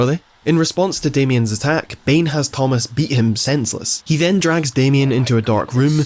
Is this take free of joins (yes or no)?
yes